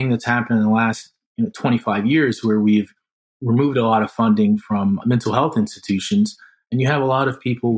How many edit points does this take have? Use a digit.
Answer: 1